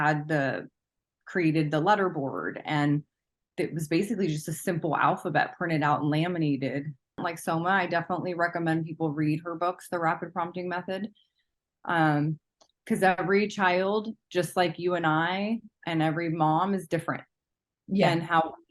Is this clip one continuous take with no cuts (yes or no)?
no